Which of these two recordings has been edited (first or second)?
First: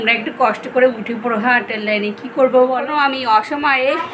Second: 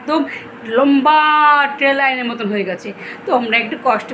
first